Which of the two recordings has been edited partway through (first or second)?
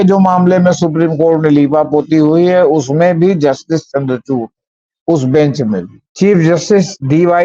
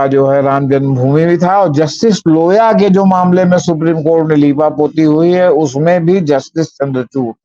first